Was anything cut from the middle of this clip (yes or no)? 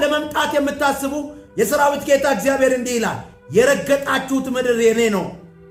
no